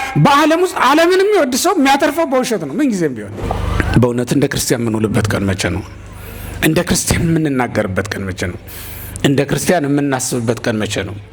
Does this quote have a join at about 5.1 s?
no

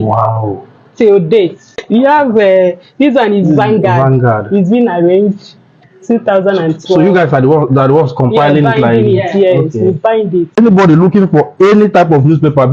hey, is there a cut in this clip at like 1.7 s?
yes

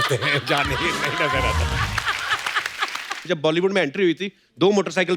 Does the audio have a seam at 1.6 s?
no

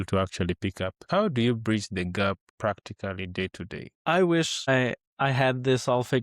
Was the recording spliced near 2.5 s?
yes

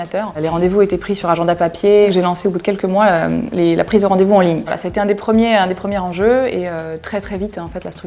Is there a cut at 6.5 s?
no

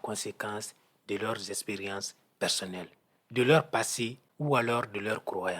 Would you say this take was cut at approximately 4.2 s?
yes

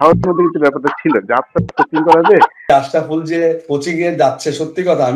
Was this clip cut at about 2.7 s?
yes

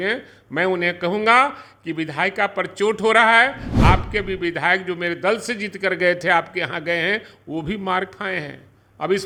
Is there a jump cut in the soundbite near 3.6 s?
no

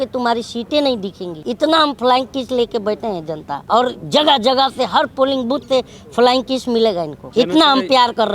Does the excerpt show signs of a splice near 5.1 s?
no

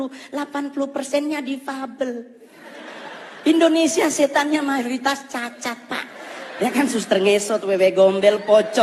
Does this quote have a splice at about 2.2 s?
no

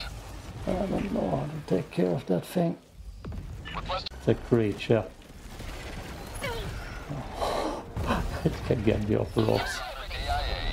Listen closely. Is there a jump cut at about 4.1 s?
yes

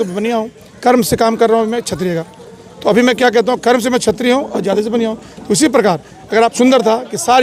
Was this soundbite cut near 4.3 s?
no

